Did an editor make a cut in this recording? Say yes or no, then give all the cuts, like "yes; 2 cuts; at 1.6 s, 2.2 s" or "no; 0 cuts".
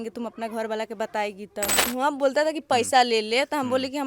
yes; 1 cut; at 1.8 s